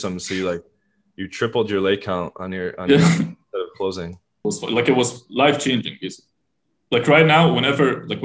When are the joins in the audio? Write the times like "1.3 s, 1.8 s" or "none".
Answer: 4.3 s